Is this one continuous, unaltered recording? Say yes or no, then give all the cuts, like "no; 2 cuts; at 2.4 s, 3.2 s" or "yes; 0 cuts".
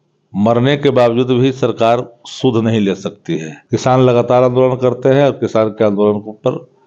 no; 1 cut; at 3.5 s